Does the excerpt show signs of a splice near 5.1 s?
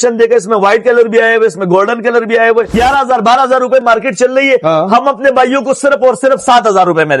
no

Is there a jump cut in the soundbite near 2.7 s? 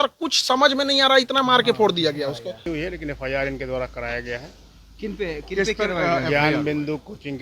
yes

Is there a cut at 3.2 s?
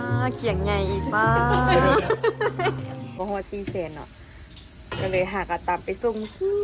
yes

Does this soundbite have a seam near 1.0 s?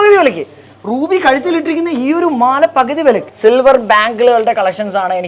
no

